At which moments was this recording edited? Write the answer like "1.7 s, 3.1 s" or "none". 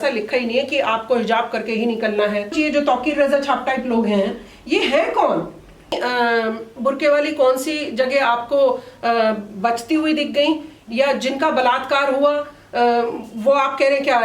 2.5 s, 6.0 s